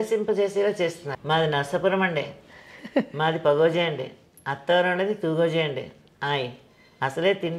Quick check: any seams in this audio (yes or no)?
yes